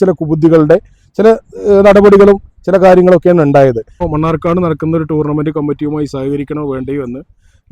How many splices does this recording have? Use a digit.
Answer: 1